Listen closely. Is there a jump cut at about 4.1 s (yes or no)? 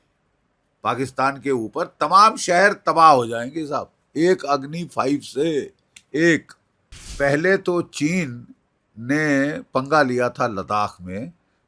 no